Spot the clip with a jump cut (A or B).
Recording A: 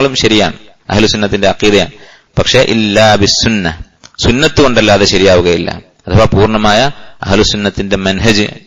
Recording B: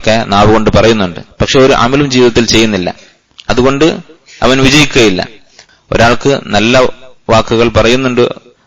B